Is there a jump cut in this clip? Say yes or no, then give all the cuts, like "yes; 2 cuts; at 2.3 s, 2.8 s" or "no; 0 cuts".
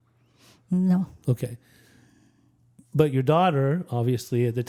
no; 0 cuts